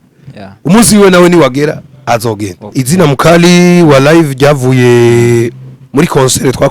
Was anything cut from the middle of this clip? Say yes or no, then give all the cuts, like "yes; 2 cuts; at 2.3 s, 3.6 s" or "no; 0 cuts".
yes; 1 cut; at 2.8 s